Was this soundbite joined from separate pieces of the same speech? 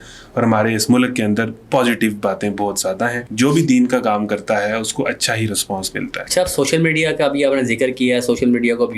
yes; 2 cuts; at 3.2 s, 6.2 s

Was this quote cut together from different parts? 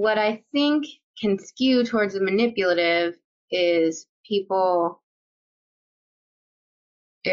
yes; 1 cut; at 1.0 s

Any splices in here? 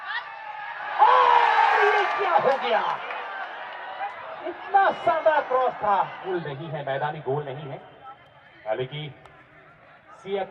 yes; 1 cut; at 6.2 s

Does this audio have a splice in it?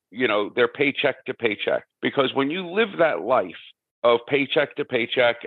yes; 1 cut; at 1.9 s

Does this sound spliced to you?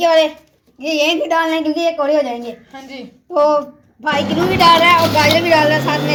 no; 0 cuts

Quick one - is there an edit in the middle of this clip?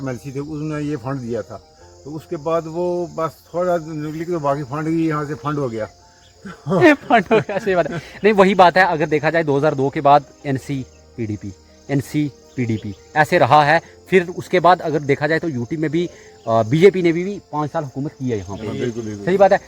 no; 0 cuts

